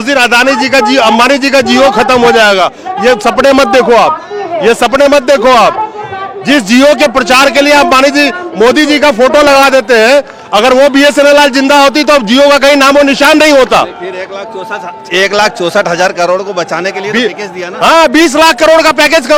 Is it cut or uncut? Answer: uncut